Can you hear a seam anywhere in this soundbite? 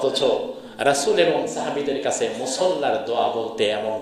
no; 0 cuts

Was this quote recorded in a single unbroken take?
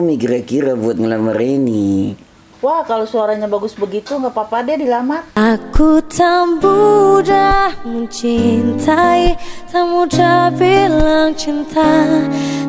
yes; 0 cuts

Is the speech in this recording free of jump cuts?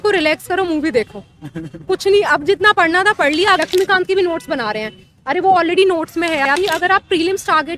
no; 2 cuts; at 3.5 s, 6.5 s

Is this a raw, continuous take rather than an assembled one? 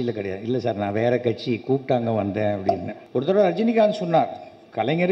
no; 1 cut; at 2.9 s

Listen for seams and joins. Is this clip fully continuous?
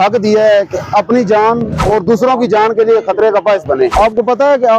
no; 2 cuts; at 1.7 s, 3.9 s

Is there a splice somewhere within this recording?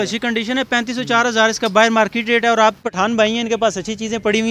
yes; 1 cut; at 2.8 s

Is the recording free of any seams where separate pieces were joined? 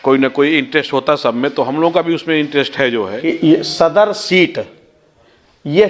no; 1 cut; at 3.1 s

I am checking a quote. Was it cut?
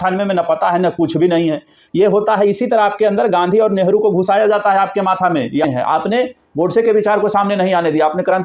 yes; 1 cut; at 5.6 s

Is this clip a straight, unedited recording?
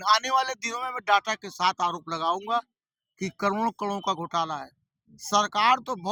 yes; 0 cuts

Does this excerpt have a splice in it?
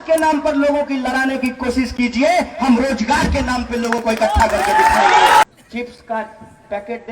yes; 1 cut; at 5.4 s

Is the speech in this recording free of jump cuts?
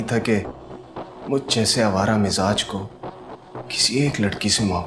yes; 0 cuts

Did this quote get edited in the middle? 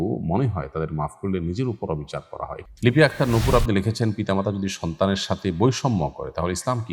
yes; 1 cut; at 2.6 s

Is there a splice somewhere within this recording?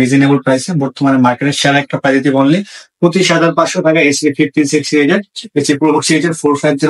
no; 0 cuts

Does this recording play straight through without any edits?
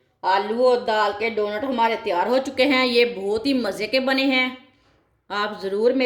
yes; 0 cuts

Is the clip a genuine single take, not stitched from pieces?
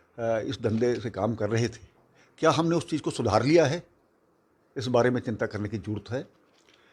yes; 0 cuts

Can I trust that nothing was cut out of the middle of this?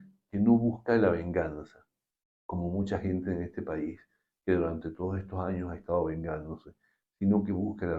yes; 0 cuts

